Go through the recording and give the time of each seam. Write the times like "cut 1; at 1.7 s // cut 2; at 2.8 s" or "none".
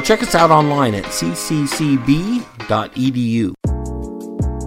cut 1; at 3.6 s

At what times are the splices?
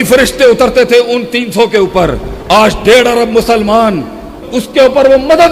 cut 1; at 4.5 s

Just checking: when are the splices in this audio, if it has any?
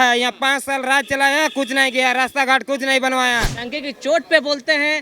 cut 1; at 3.6 s

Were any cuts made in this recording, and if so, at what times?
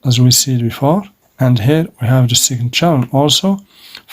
cut 1; at 1.2 s

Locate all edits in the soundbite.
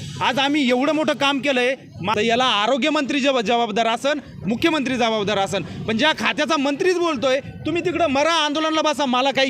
cut 1; at 2.0 s

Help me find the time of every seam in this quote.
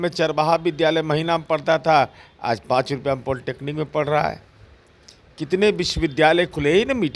none

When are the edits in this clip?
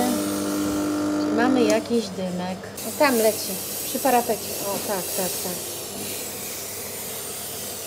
none

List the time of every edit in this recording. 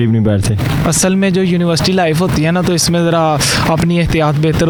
none

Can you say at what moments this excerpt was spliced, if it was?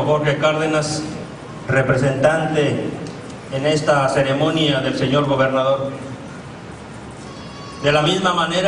cut 1; at 5.0 s

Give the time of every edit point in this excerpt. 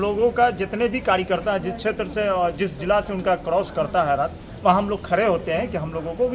none

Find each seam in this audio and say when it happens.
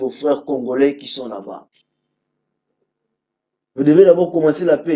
none

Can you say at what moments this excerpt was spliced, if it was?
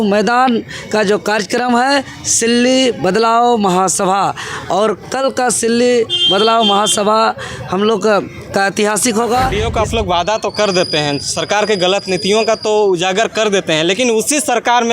cut 1; at 9.6 s

